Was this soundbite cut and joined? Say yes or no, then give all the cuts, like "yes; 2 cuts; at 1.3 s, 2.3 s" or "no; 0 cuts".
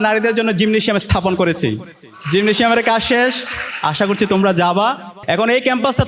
yes; 1 cut; at 5.1 s